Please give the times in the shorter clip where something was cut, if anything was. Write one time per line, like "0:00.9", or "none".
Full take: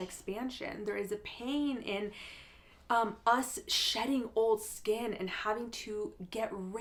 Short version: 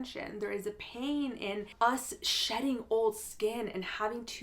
0:01.7